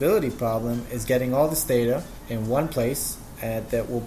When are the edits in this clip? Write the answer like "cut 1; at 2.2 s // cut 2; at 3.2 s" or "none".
cut 1; at 2.2 s